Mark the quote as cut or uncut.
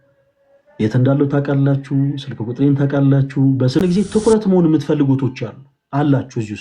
cut